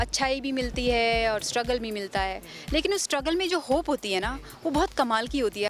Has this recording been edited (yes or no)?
no